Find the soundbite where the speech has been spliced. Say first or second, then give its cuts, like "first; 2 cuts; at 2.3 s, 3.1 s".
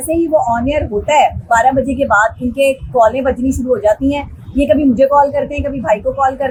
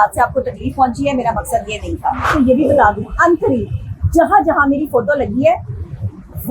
second; 1 cut; at 2.3 s